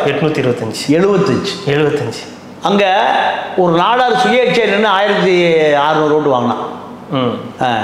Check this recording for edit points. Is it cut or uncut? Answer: uncut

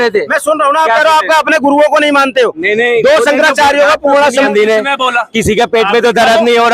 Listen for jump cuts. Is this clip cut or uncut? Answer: cut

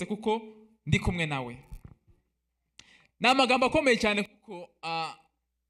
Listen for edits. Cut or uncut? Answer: uncut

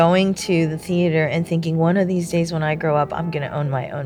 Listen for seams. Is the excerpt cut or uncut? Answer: uncut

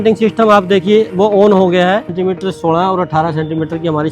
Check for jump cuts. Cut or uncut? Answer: cut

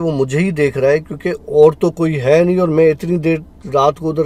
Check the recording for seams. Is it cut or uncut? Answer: uncut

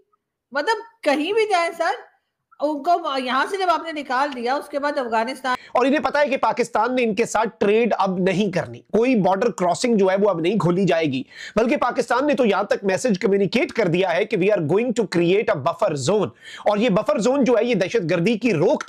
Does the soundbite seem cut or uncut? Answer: cut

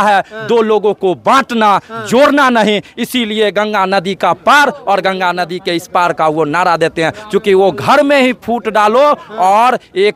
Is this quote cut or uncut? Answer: uncut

